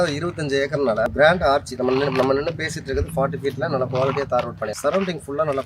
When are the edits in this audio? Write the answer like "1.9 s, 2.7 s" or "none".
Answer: 1.1 s, 4.7 s